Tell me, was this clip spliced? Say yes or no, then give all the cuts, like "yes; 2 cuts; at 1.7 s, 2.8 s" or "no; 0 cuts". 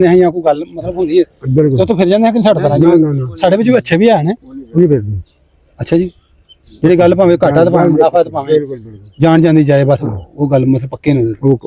no; 0 cuts